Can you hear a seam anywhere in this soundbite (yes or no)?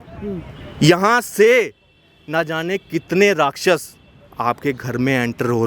no